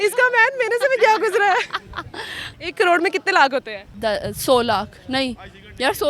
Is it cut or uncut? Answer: cut